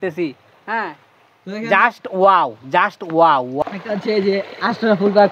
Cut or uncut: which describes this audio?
cut